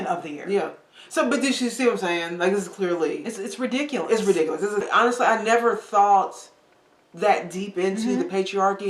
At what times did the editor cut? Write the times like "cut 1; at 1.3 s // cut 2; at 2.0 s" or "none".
cut 1; at 4.9 s